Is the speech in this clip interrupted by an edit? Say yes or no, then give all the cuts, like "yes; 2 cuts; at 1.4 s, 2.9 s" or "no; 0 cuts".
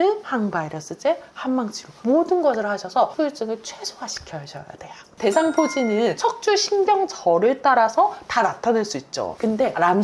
no; 0 cuts